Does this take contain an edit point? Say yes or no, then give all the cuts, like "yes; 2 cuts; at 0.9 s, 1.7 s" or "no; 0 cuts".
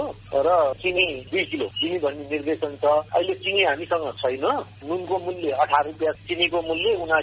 yes; 3 cuts; at 1.3 s, 3.1 s, 6.2 s